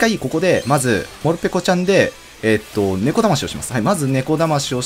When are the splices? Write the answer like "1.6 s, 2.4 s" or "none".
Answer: 1.1 s